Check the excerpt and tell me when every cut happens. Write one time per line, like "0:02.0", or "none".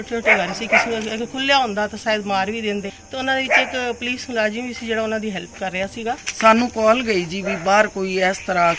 0:02.9
0:06.3